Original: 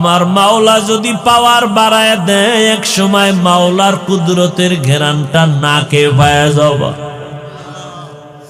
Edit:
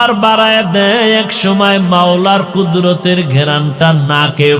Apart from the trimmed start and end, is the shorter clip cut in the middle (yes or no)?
no